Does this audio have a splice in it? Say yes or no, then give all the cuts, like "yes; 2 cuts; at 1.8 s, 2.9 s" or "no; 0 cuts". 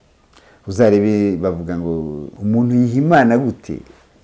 yes; 1 cut; at 2.2 s